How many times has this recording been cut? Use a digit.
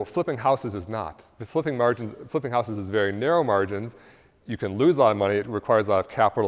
0